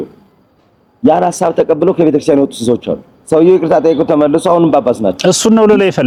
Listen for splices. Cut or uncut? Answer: uncut